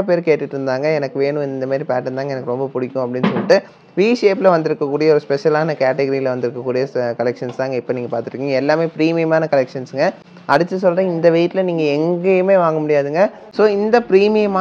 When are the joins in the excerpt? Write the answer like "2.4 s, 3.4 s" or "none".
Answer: none